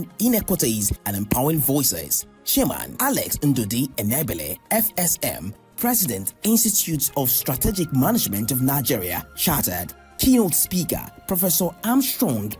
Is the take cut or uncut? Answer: cut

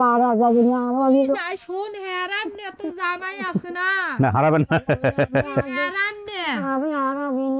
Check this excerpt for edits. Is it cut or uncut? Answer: uncut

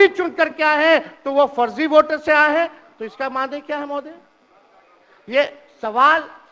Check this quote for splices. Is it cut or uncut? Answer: uncut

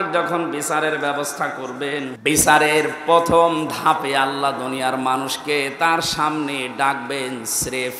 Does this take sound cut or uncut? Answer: cut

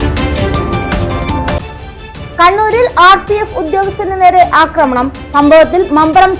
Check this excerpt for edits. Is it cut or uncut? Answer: cut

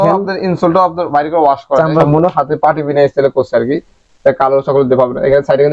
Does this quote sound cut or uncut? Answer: cut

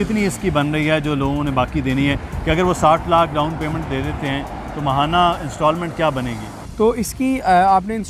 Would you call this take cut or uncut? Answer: uncut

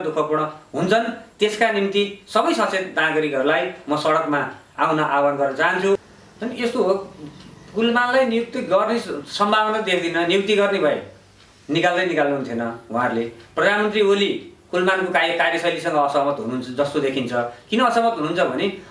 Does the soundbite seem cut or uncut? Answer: cut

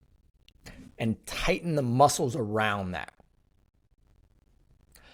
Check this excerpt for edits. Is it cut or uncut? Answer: uncut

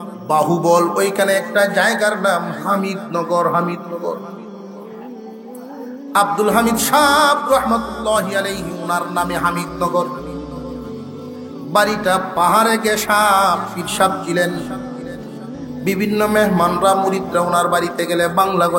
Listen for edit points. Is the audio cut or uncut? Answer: cut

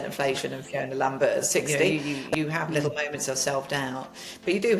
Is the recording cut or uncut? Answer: cut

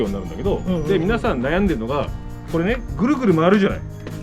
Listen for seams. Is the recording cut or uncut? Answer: uncut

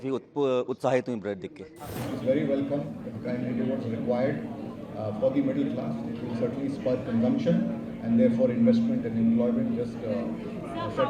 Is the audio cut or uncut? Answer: cut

